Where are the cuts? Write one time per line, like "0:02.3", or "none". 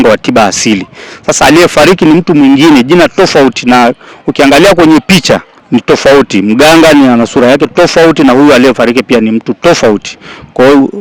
0:05.5